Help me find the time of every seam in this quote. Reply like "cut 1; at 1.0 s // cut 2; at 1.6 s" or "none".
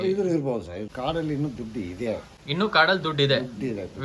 cut 1; at 0.9 s // cut 2; at 2.4 s